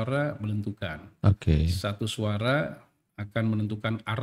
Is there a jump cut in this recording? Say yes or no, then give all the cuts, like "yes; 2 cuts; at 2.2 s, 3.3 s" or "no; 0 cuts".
no; 0 cuts